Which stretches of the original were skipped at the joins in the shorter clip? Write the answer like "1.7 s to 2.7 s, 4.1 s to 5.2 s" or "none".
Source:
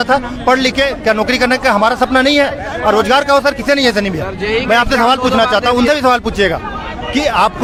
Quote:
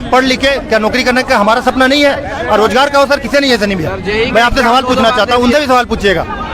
none